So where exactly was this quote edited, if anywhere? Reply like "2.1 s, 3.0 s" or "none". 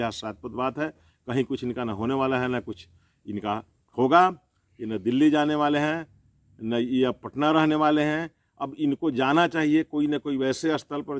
none